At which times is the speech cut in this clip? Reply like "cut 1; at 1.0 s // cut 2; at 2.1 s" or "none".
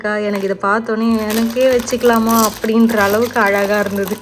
none